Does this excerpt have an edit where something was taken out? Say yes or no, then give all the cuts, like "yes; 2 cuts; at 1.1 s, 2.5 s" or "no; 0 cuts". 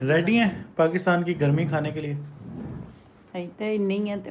no; 0 cuts